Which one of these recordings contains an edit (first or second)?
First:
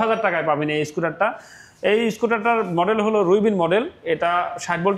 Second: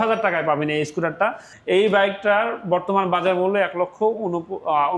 second